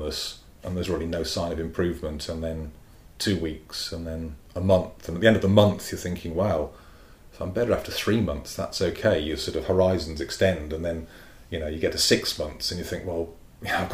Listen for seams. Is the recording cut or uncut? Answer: uncut